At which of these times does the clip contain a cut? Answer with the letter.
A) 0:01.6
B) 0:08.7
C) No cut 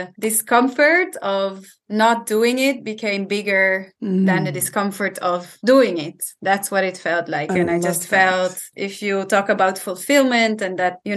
B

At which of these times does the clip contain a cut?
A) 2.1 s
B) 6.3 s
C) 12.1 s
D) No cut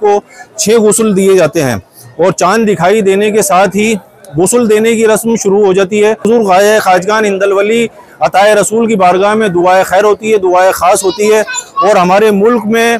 B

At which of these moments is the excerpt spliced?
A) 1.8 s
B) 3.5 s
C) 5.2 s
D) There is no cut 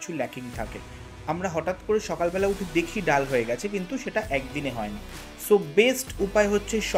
C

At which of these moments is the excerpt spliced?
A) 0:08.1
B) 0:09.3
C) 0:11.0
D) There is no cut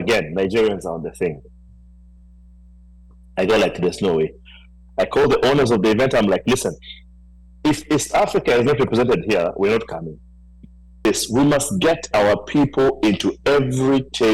C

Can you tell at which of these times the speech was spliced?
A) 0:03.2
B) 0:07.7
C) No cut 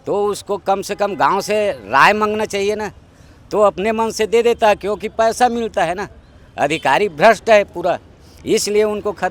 C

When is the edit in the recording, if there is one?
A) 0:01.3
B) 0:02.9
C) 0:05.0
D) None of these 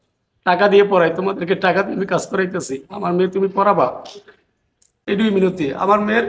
C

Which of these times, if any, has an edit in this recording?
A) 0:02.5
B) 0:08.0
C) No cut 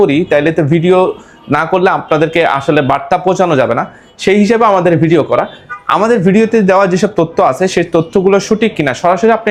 C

